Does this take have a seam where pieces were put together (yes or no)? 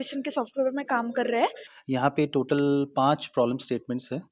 yes